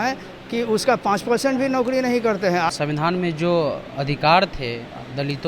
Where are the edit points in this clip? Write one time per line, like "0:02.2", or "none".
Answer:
0:02.7